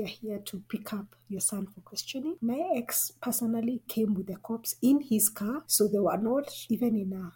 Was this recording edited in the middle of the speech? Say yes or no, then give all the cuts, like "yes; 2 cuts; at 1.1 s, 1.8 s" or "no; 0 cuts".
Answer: yes; 2 cuts; at 2.4 s, 5.6 s